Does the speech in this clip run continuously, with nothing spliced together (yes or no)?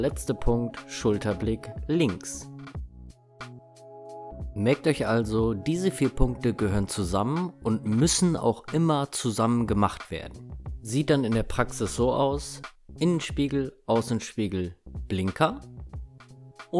yes